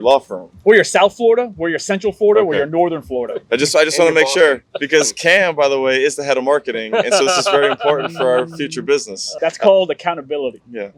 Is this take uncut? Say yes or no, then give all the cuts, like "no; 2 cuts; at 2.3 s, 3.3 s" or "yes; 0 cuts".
yes; 0 cuts